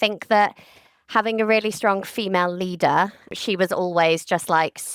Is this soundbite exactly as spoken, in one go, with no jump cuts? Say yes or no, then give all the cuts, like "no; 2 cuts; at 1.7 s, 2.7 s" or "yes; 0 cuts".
no; 1 cut; at 3.3 s